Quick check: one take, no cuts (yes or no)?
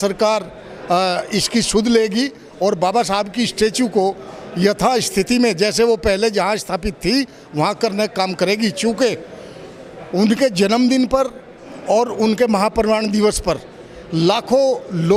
yes